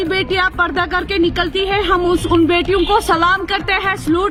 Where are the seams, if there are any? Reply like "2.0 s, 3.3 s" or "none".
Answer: none

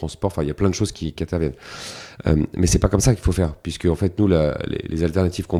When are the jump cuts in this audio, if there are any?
none

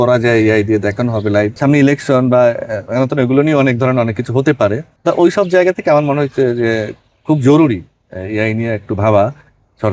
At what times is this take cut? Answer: 1.6 s, 4.9 s

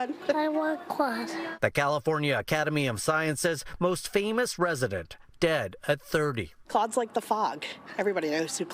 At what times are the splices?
none

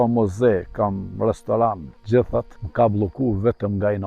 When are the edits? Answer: 1.9 s, 2.6 s

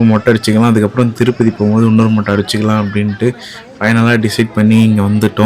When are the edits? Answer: none

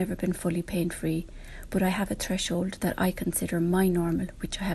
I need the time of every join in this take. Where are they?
none

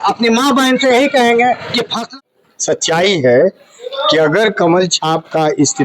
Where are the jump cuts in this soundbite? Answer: 2.0 s

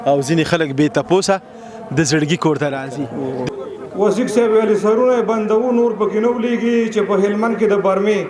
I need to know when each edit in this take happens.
3.4 s

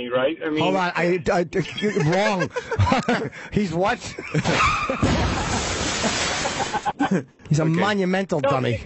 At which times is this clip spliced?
none

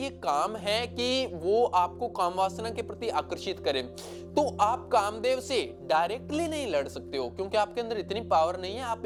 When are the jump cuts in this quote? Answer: none

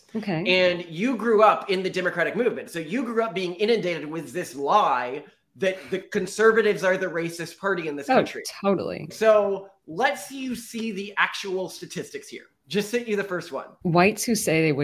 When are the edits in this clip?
9.1 s, 13.7 s

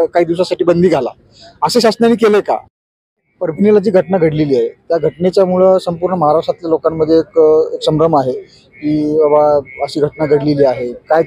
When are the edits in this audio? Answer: 2.9 s

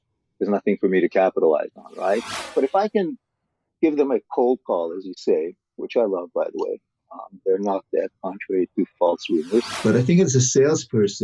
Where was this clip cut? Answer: 2.4 s, 9.7 s

